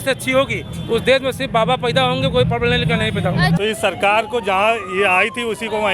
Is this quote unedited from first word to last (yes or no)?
no